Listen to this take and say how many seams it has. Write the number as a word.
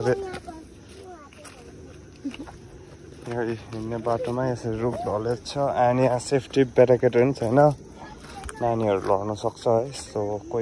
zero